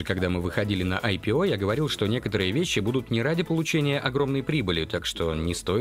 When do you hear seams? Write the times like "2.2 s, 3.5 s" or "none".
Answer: none